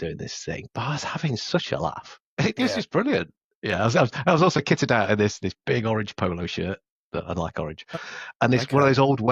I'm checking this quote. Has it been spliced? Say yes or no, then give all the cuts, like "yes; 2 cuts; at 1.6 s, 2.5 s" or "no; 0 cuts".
yes; 1 cut; at 6.9 s